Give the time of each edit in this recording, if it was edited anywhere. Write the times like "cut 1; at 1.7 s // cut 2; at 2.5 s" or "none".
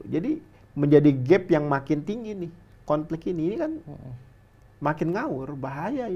none